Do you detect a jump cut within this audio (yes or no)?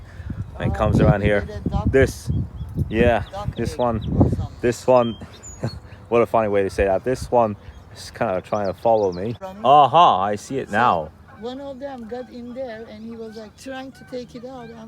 no